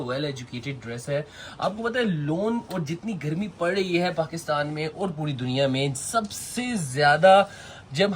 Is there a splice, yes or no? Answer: no